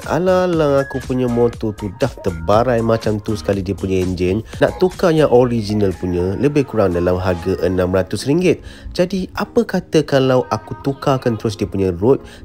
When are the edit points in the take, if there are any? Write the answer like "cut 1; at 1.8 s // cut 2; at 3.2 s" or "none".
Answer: cut 1; at 4.6 s